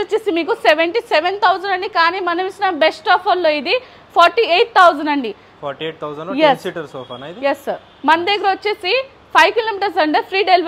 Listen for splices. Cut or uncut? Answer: uncut